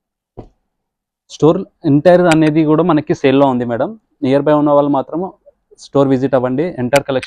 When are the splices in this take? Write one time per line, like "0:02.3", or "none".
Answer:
none